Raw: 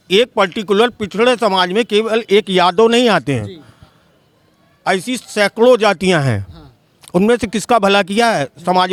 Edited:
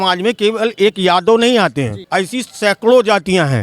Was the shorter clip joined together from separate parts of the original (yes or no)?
yes